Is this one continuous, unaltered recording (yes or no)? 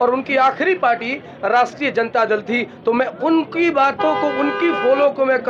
yes